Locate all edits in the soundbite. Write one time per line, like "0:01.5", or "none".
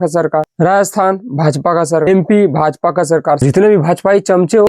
0:03.4